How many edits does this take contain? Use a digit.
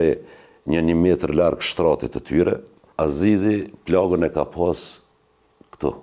1